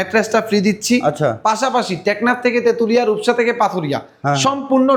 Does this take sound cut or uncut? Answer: uncut